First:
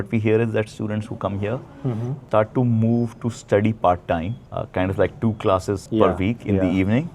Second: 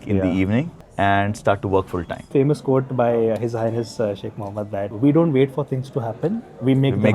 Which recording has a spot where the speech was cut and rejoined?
second; 1 cut; at 2.3 s

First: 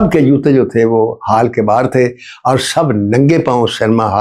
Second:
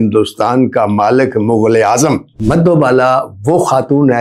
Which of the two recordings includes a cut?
second; 1 cut; at 2.4 s

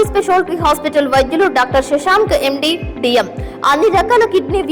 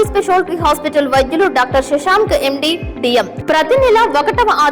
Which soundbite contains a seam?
second; 1 cut; at 3.4 s

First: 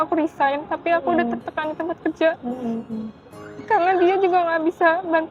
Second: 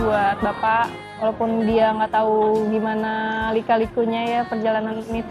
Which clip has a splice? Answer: second; 1 cut; at 1.1 s

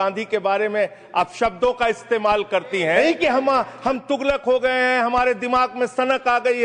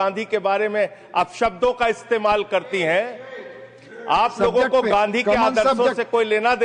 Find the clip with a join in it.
first; 1 cut; at 3.0 s

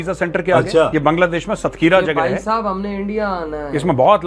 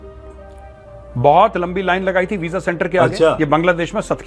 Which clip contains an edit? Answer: second; 1 cut; at 1.1 s

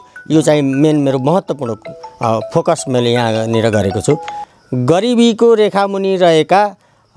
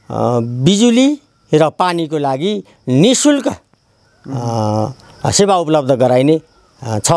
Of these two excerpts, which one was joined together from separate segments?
first; 1 cut; at 4.3 s

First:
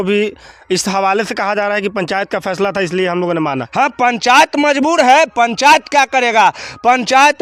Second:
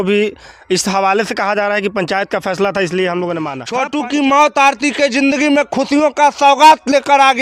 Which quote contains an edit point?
second; 1 cut; at 3.6 s

